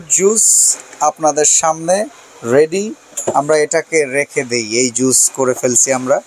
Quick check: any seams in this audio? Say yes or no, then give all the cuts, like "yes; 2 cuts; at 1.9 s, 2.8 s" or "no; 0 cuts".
no; 0 cuts